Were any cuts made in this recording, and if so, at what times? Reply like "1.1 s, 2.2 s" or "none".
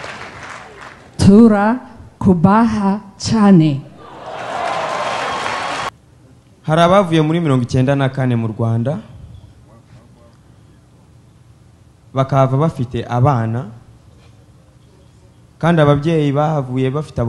5.9 s